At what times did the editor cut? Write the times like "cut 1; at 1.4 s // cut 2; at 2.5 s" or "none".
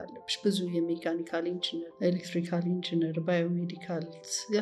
cut 1; at 1.9 s